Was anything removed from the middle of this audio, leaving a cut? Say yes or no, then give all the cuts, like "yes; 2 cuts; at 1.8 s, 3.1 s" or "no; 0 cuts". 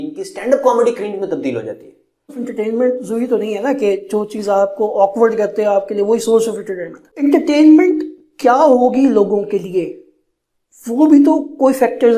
yes; 2 cuts; at 2.4 s, 7.1 s